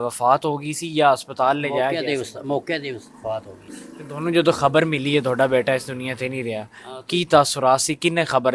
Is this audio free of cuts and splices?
yes; 0 cuts

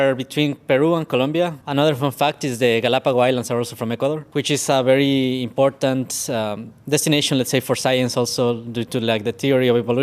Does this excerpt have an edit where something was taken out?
yes; 2 cuts; at 1.6 s, 4.2 s

